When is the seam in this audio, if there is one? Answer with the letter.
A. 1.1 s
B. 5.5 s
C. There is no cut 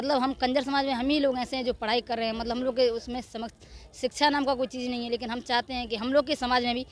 C